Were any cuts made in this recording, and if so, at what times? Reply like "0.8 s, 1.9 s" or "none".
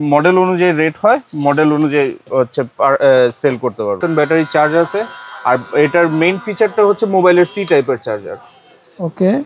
4.0 s